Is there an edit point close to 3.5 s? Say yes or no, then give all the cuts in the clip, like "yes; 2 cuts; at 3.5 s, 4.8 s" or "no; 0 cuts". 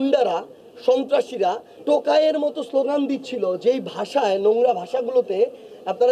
no; 1 cut; at 1.7 s